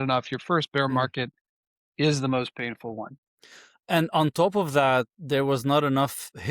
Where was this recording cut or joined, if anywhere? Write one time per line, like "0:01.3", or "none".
none